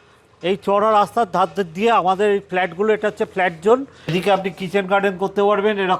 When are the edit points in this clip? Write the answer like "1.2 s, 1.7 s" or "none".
4.1 s